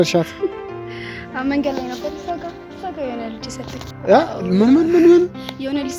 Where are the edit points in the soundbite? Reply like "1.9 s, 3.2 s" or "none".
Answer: none